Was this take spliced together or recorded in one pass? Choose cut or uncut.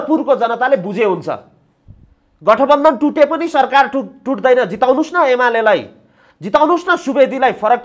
uncut